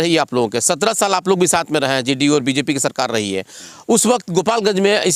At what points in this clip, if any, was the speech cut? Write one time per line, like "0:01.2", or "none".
none